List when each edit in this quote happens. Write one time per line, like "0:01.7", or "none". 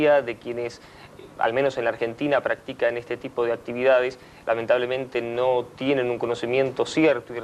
0:06.4